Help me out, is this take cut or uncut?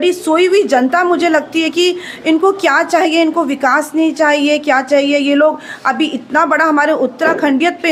uncut